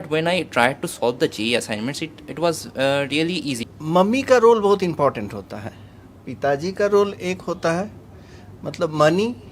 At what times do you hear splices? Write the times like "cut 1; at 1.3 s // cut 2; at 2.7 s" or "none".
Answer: cut 1; at 3.6 s